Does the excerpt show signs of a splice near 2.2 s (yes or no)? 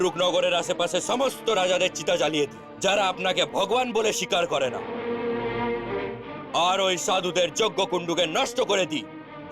no